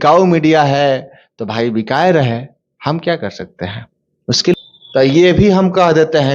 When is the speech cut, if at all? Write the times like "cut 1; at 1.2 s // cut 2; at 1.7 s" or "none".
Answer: cut 1; at 4.5 s